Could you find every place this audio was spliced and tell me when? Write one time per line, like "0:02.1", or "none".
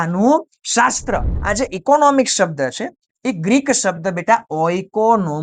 0:01.3

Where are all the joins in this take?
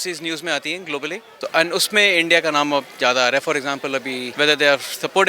0:01.3
0:04.3

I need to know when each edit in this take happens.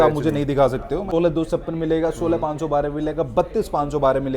0:01.0

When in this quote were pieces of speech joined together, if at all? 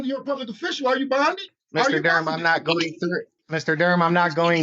0:01.5
0:03.4

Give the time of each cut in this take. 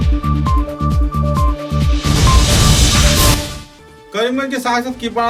none

